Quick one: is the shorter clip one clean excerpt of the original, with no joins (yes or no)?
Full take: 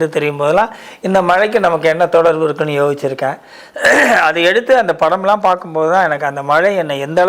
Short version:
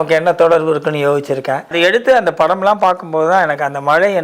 no